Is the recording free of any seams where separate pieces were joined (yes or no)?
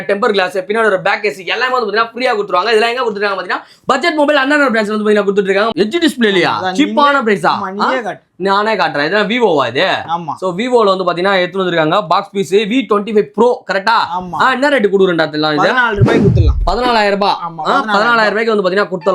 no